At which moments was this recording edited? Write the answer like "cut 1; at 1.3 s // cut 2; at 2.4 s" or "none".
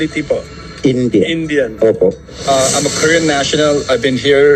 cut 1; at 2.5 s